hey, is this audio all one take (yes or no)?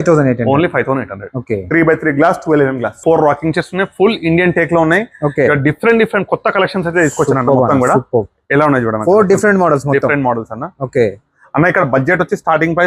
no